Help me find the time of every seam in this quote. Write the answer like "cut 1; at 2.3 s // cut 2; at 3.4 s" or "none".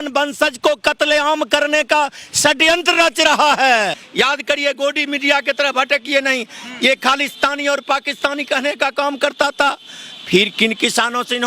cut 1; at 4.0 s